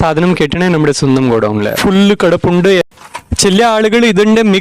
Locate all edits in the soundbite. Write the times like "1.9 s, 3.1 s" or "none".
1.7 s, 2.9 s